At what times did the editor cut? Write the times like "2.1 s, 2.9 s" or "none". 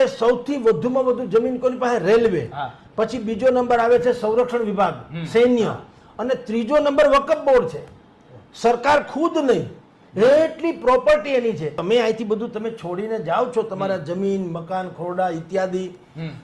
11.8 s